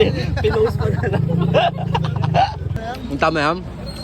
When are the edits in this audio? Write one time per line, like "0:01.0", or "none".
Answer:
0:02.8